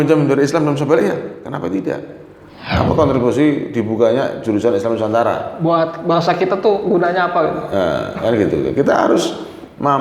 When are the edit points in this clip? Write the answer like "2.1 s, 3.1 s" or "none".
2.6 s